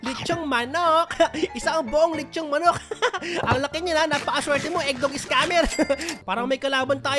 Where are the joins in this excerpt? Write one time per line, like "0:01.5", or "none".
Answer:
0:06.1